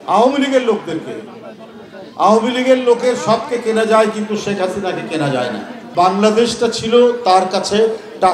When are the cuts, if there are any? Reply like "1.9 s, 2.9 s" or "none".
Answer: 5.8 s